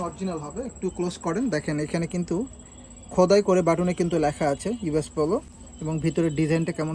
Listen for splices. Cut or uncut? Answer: uncut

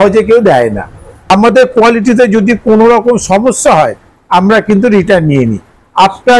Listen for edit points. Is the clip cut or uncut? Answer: cut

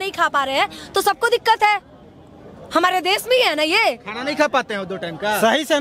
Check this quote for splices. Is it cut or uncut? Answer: uncut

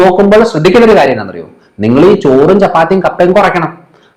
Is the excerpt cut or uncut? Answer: uncut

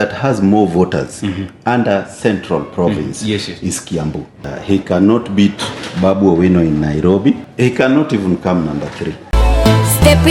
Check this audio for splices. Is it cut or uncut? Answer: cut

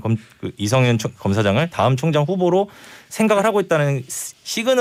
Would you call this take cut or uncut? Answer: uncut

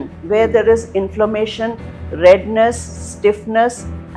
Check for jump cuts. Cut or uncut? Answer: uncut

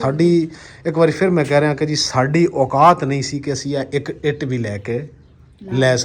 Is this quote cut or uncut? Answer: uncut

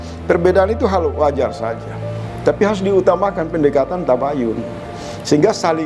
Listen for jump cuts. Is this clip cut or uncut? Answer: uncut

